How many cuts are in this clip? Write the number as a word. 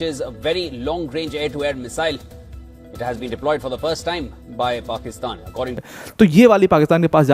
one